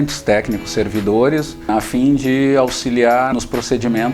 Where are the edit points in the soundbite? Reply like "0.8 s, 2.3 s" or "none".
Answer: 1.6 s, 3.3 s